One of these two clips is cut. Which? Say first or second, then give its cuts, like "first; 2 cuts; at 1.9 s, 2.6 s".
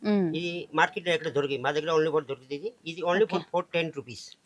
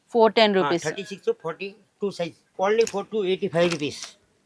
second; 1 cut; at 2.4 s